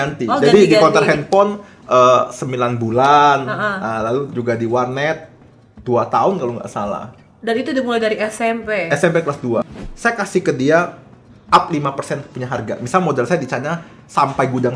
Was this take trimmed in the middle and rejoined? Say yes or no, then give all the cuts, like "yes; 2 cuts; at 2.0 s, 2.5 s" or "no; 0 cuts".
yes; 1 cut; at 9.6 s